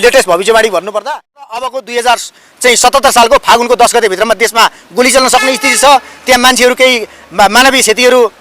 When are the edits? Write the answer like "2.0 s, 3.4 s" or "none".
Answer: 1.0 s